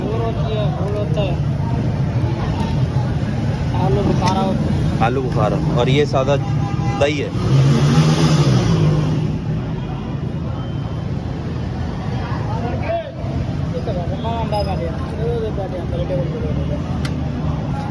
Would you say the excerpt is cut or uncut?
uncut